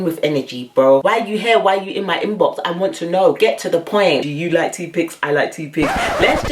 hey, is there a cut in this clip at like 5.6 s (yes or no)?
no